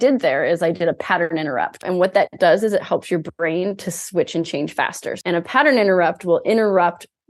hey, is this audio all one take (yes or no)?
no